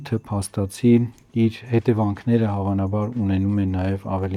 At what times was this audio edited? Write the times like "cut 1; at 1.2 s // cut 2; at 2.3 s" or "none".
none